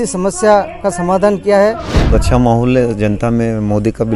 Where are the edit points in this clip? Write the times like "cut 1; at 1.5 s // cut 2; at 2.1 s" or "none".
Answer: cut 1; at 1.9 s